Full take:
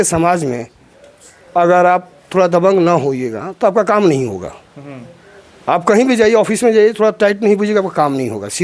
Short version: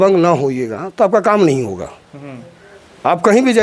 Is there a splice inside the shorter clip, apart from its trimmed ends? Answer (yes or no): no